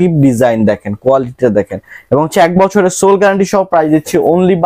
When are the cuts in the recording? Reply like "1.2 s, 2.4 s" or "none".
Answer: none